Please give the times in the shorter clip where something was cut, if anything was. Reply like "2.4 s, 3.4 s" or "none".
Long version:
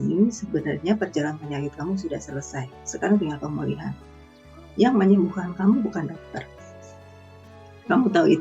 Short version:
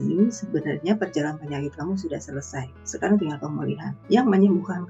3.9 s